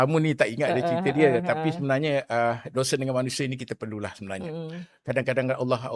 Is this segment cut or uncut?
uncut